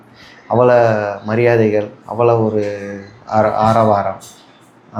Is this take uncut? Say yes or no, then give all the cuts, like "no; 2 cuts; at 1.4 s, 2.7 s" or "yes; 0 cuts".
yes; 0 cuts